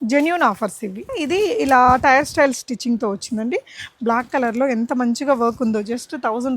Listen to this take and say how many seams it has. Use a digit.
1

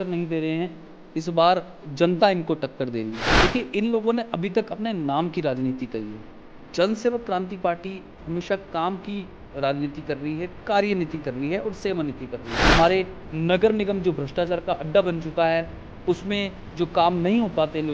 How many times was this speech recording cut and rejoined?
2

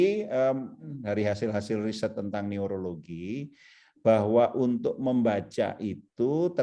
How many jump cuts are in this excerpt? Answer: 1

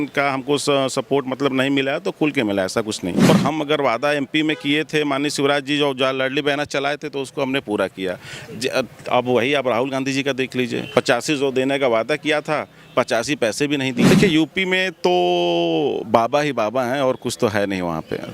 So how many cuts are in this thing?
2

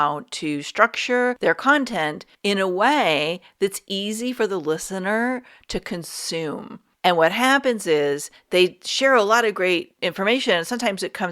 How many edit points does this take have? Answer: 4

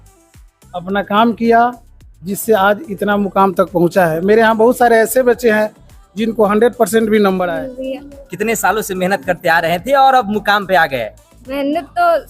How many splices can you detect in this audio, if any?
1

